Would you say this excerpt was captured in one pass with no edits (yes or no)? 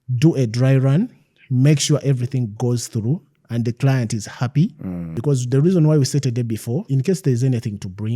no